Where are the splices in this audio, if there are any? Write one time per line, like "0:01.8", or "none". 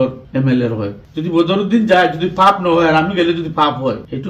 0:01.0

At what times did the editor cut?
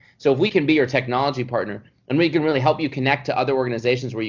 none

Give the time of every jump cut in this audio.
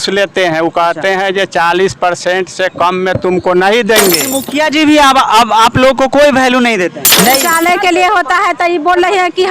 0:04.3
0:07.4

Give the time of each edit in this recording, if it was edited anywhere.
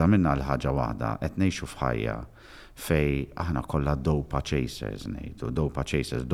none

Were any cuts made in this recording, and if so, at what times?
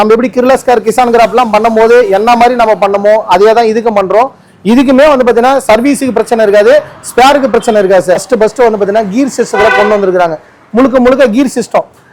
0:08.3

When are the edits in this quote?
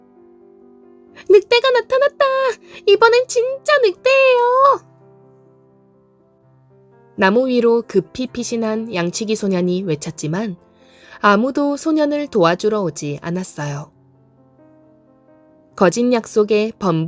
none

